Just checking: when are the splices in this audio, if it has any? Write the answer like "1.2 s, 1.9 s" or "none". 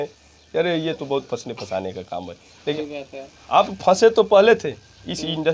2.8 s